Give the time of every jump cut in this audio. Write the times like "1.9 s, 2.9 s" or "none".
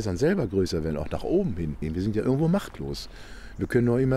1.8 s

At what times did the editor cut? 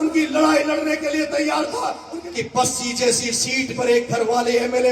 2.0 s

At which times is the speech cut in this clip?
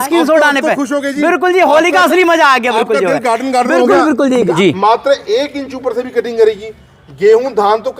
4.5 s

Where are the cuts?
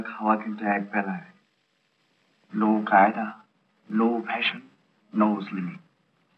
none

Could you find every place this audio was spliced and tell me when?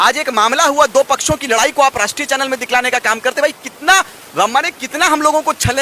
none

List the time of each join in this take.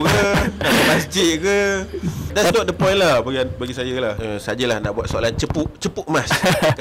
2.3 s, 4.2 s

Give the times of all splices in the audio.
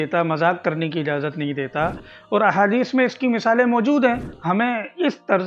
2.0 s, 4.3 s

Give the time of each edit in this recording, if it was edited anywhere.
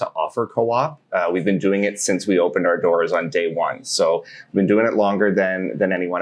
none

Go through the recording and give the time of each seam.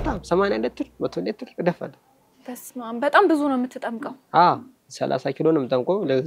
none

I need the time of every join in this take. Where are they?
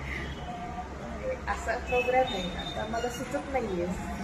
none

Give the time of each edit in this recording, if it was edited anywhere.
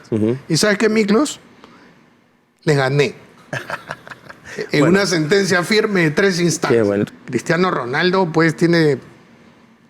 7.1 s

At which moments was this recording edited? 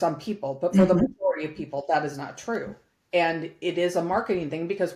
none

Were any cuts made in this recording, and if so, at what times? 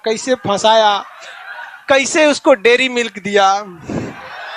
none

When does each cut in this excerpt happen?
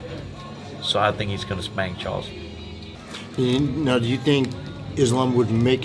2.9 s

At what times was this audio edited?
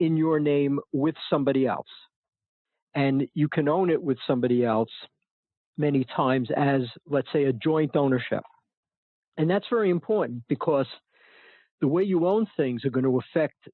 none

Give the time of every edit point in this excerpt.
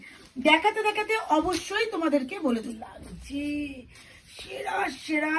2.7 s

